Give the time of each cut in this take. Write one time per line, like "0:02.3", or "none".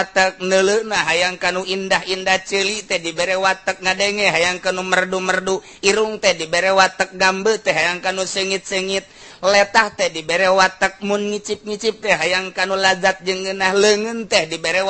none